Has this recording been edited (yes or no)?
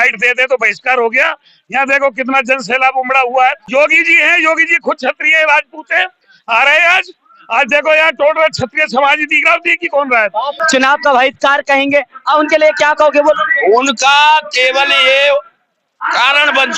yes